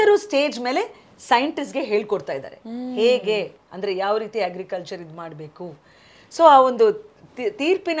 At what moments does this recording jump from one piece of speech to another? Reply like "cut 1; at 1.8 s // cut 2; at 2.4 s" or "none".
none